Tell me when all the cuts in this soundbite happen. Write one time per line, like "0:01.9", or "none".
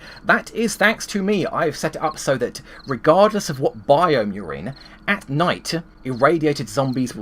0:05.9